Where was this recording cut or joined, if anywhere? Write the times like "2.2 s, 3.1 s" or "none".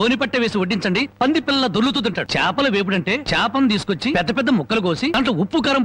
2.3 s, 3.2 s, 4.1 s, 5.1 s